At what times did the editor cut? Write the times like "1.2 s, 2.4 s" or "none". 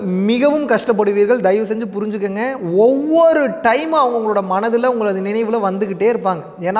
none